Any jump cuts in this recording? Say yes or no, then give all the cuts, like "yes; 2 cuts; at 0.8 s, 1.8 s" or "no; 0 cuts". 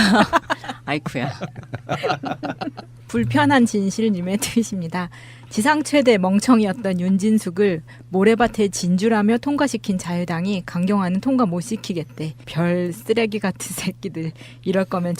no; 0 cuts